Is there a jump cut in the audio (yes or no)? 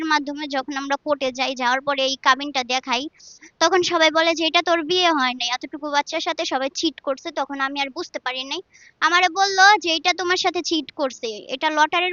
no